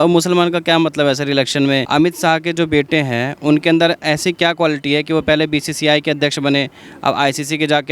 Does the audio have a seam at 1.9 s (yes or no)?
yes